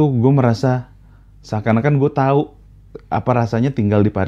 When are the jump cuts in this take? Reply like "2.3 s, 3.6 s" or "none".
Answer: none